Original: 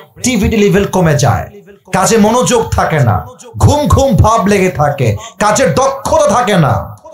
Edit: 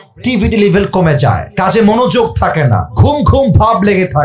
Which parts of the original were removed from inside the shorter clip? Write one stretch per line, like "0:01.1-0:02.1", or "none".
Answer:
0:01.5-0:01.8
0:03.2-0:03.5